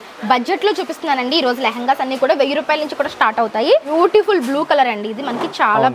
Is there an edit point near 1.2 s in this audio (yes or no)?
no